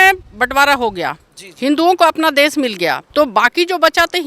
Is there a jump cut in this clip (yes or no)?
yes